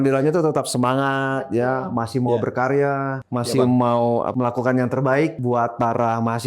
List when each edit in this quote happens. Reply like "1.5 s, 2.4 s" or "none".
3.2 s, 4.3 s, 5.4 s